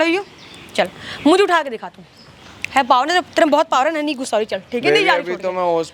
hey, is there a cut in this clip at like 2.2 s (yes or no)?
no